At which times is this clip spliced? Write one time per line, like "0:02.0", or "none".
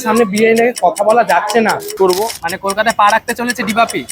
0:01.9